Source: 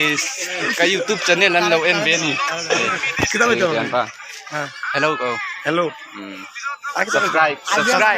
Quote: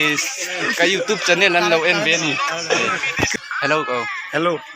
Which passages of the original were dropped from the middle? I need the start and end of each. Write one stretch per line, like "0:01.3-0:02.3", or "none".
0:03.3-0:04.6